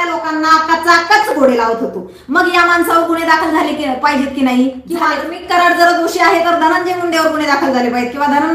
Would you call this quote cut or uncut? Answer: cut